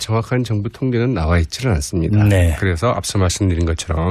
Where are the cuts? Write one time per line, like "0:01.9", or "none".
0:02.6